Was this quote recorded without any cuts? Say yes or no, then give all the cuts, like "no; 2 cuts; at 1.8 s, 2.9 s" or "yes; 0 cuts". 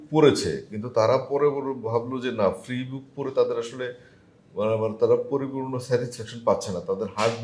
yes; 0 cuts